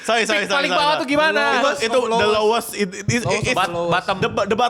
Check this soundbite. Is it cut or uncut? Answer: uncut